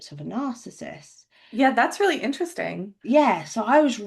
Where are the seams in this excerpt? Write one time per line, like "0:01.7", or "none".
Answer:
none